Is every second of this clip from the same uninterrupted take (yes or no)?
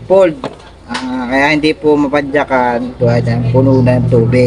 yes